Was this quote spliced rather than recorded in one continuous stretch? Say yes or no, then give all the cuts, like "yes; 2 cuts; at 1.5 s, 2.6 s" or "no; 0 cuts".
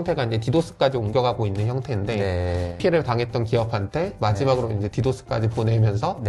no; 0 cuts